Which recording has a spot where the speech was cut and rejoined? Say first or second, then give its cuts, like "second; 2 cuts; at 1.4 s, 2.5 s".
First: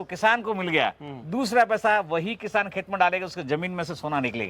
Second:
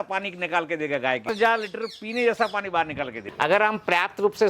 second; 2 cuts; at 1.2 s, 3.2 s